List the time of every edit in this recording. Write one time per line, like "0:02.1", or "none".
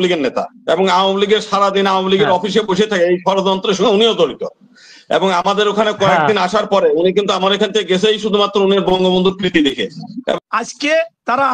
0:10.4